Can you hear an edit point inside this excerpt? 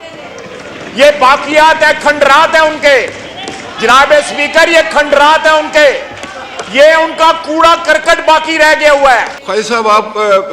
yes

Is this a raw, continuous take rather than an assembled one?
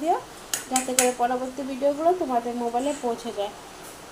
yes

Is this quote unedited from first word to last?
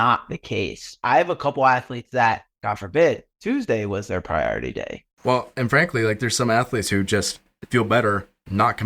no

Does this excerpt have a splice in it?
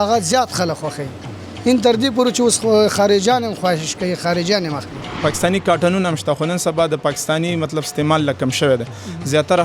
yes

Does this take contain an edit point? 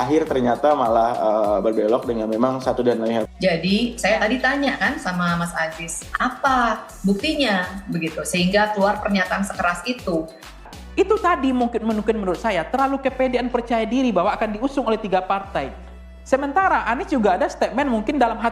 yes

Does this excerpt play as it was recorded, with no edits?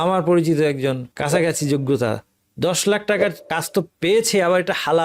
no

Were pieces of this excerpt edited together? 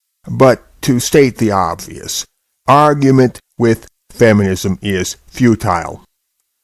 yes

